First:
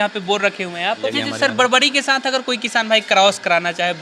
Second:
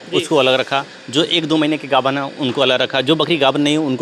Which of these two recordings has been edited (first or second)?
first